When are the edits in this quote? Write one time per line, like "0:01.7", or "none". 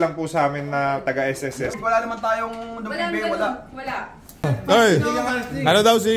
0:01.8
0:04.3